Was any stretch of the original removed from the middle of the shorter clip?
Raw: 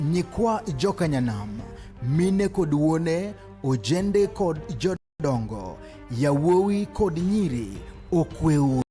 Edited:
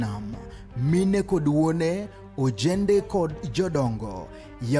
yes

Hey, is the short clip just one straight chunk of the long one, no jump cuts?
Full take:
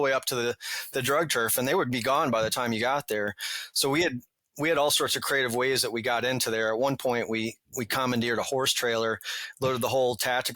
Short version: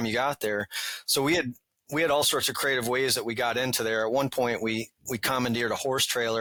yes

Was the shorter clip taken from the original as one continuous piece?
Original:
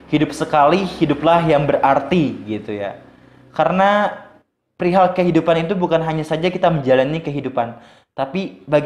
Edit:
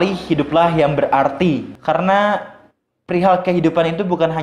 no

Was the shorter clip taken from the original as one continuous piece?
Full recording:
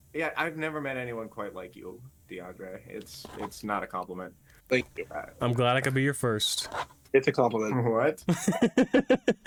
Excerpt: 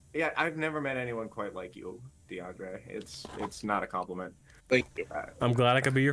yes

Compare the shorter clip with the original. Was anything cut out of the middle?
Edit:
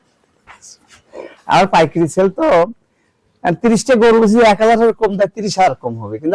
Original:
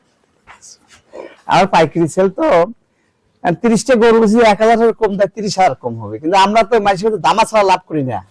no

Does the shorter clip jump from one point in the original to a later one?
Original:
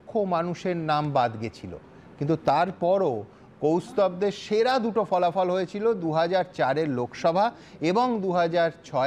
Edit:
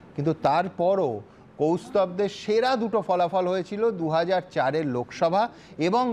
no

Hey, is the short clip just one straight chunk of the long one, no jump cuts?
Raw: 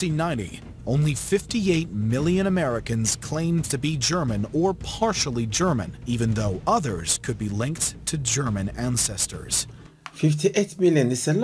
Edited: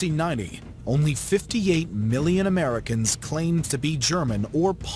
yes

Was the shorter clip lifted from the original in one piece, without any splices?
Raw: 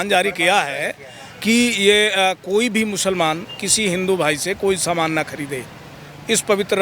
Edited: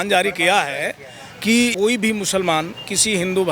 no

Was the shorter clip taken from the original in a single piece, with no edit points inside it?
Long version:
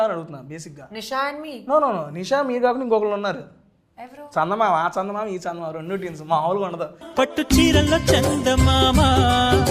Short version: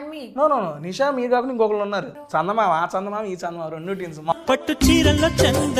no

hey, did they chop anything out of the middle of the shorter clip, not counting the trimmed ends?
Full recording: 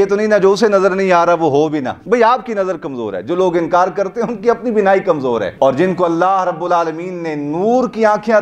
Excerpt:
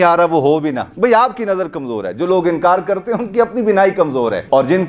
no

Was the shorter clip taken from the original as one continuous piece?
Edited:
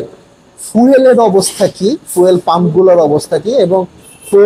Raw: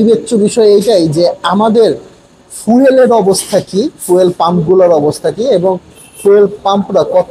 yes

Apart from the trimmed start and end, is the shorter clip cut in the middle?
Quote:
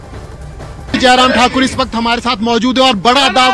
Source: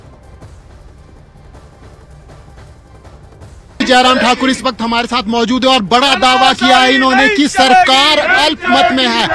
yes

